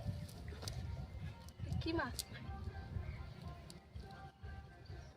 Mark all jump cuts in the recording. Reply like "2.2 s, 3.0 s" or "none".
2.3 s